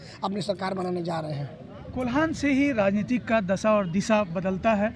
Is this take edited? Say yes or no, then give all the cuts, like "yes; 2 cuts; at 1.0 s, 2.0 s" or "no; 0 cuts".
no; 0 cuts